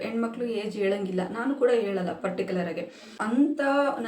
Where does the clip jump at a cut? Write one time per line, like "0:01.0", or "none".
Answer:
0:03.1